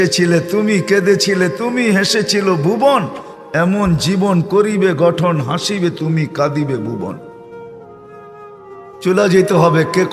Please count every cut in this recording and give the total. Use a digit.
0